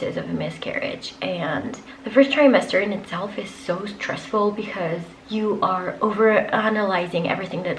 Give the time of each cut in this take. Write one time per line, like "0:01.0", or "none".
none